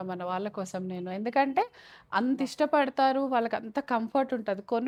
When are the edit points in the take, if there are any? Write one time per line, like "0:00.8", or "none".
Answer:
none